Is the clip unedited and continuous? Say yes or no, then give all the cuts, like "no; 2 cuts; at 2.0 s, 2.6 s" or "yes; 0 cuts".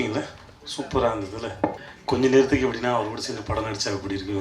no; 1 cut; at 1.9 s